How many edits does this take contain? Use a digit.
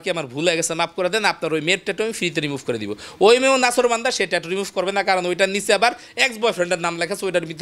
0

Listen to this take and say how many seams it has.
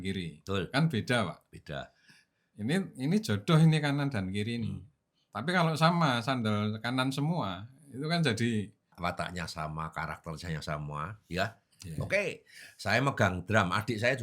1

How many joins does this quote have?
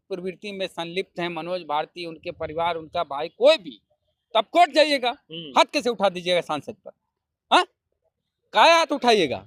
0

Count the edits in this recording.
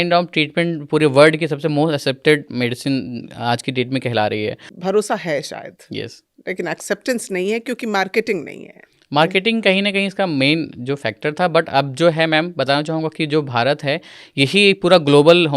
1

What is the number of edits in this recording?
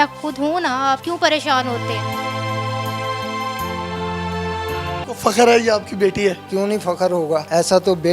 1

